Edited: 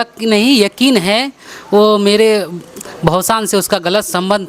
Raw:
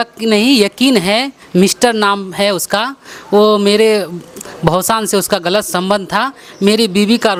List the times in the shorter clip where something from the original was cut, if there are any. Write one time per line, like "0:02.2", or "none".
0:01.4